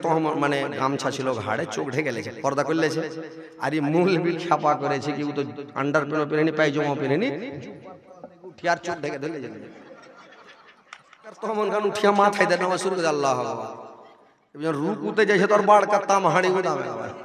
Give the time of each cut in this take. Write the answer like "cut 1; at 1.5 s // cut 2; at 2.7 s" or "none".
cut 1; at 11.5 s